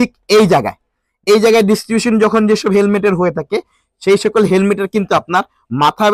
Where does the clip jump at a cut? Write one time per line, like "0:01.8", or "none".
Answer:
none